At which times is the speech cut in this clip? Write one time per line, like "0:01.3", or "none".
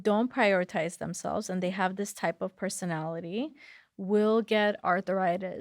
none